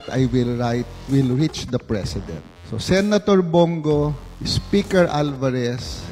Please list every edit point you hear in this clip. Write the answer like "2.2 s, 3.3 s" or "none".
none